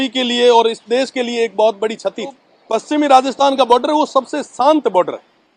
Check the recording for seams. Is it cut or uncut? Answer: cut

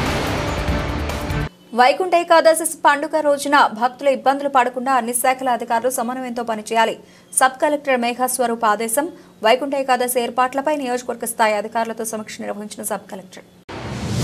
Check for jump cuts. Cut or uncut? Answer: cut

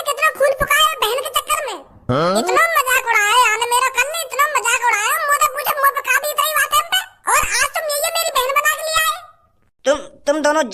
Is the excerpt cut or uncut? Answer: cut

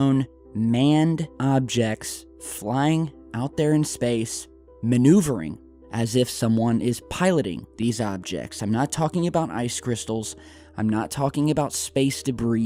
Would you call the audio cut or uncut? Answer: uncut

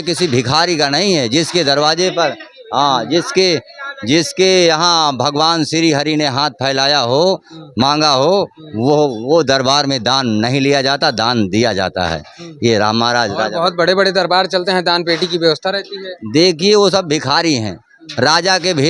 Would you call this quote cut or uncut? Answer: uncut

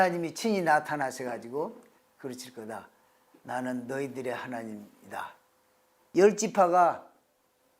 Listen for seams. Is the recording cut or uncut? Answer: cut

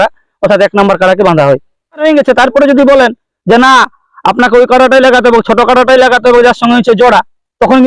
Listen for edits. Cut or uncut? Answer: cut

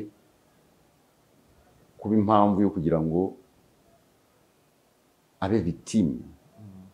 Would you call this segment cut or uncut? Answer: uncut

